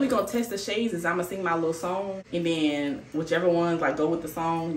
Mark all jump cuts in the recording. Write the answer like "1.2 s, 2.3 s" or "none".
2.2 s